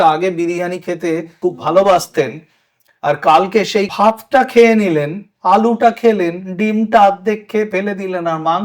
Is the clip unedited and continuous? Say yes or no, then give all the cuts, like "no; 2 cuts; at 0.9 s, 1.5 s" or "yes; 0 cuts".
no; 2 cuts; at 1.3 s, 3.9 s